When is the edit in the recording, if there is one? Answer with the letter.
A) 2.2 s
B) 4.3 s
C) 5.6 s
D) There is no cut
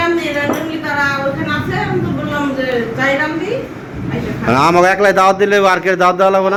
D